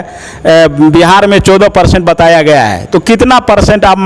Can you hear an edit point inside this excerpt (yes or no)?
no